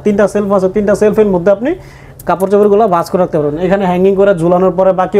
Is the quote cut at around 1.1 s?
no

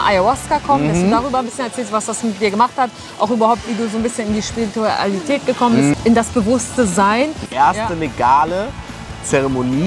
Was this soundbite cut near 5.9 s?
yes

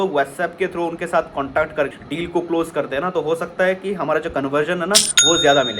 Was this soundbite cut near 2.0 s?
yes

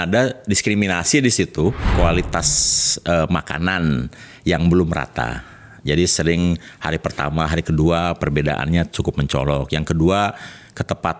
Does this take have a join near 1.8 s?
yes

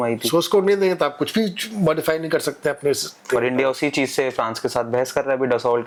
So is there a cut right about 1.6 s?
no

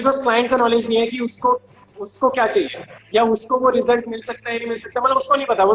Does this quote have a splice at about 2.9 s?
no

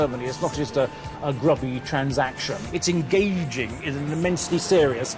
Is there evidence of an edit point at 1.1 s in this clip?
no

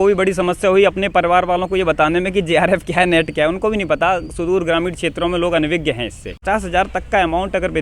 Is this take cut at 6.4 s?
yes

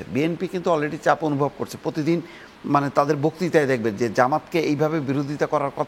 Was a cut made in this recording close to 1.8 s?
no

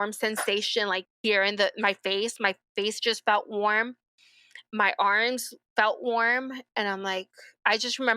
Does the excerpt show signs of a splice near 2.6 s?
no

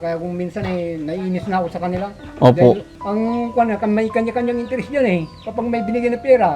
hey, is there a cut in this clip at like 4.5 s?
no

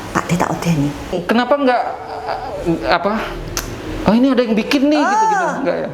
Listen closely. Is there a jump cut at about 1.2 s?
yes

